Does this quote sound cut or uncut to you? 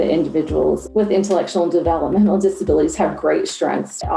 uncut